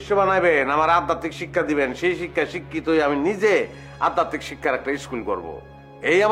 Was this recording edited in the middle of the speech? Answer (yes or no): no